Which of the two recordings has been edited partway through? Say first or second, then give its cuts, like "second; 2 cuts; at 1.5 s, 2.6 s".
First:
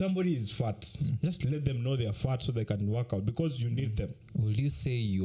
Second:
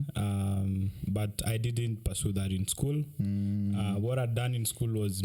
first; 1 cut; at 4.2 s